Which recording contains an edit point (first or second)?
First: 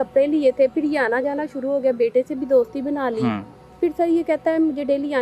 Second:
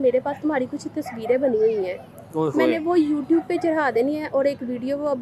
first